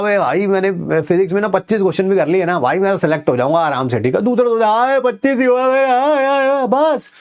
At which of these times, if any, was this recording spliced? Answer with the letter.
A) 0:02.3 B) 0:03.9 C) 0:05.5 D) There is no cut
D